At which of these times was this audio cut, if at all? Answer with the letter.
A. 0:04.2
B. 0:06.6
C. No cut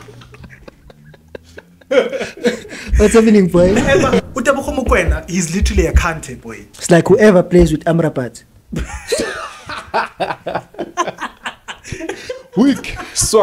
A